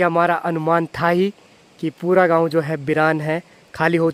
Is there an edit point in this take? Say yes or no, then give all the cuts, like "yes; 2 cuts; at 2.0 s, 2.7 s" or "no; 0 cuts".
no; 0 cuts